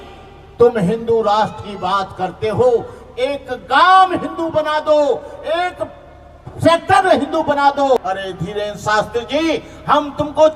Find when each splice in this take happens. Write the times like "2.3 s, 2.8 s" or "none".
8.0 s

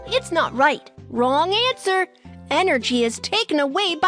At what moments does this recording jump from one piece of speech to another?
1.0 s

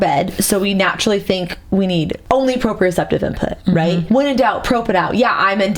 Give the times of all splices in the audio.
2.2 s, 4.0 s

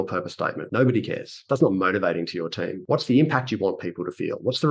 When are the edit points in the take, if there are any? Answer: 1.4 s

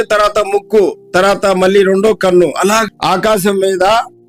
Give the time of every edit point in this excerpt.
2.9 s

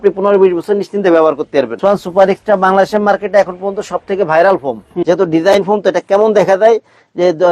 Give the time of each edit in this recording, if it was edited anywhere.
1.8 s, 5.0 s

